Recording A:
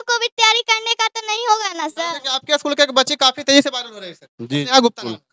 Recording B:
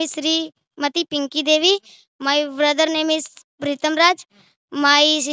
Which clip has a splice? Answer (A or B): A